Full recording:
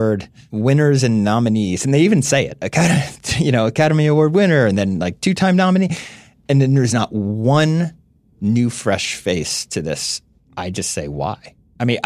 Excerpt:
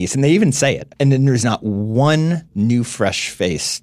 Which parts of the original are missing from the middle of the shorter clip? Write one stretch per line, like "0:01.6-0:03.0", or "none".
0:02.6-0:06.3
0:08.0-0:08.3

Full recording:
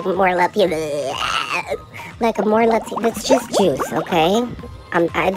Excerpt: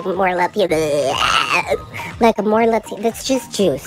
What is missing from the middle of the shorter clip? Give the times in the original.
none

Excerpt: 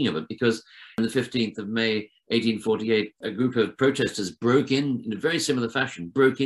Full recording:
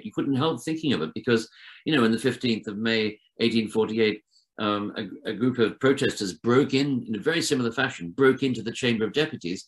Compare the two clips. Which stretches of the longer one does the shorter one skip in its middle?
0:01.8-0:02.1
0:04.3-0:05.2

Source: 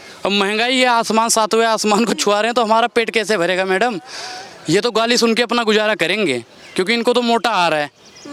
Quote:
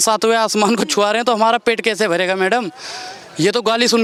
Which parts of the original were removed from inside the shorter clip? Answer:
none

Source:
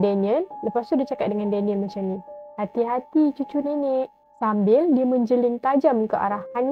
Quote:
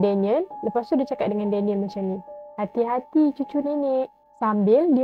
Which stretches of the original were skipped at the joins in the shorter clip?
none

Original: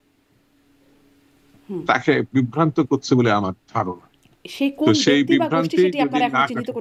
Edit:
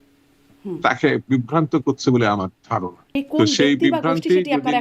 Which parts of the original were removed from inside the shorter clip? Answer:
0:04.0-0:04.5

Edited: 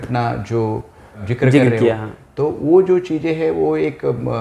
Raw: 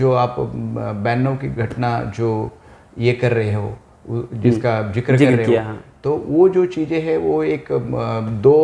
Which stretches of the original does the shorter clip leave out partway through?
0:02.9-0:04.9

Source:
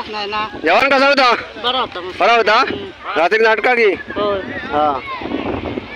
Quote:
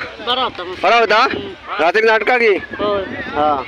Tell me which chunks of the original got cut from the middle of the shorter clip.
none

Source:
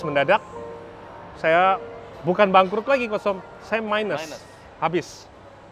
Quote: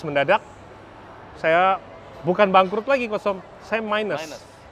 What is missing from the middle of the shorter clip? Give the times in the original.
none

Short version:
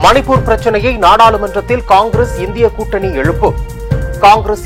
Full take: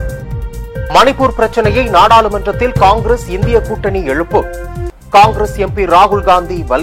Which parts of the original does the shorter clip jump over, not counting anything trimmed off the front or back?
none

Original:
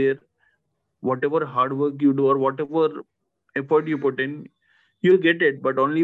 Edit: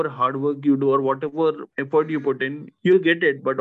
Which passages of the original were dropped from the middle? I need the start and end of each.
0:03.1-0:03.5
0:04.4-0:04.8

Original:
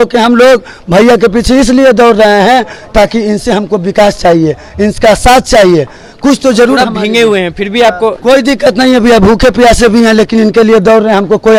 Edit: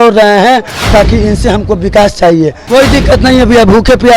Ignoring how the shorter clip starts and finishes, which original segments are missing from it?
0:04.7-0:08.2

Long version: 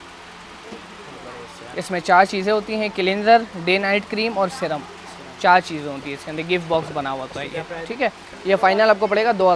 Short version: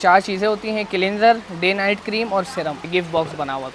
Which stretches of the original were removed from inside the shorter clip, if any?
0:04.9-0:06.4

